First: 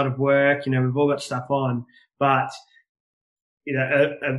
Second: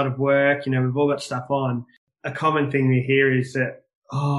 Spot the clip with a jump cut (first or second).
second